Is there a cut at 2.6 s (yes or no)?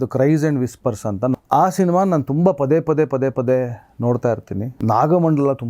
no